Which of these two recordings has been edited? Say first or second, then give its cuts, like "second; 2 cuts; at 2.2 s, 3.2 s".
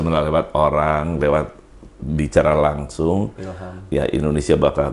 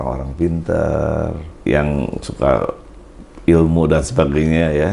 second; 1 cut; at 1.5 s